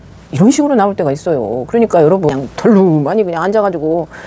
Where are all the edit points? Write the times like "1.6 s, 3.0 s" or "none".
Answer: 2.3 s